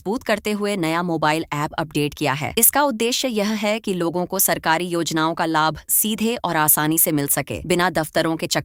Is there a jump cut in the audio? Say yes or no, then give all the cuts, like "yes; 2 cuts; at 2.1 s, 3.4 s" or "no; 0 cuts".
no; 0 cuts